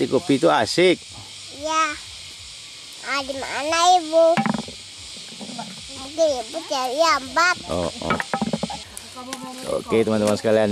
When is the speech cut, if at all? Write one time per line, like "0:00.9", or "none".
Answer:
0:08.8